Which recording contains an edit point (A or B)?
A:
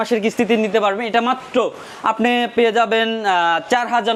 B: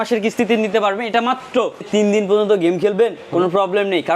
B